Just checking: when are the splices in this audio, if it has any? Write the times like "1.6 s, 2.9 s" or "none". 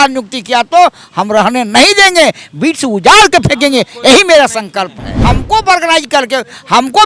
5.2 s